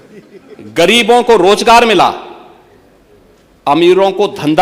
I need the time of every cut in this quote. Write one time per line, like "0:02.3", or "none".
0:00.9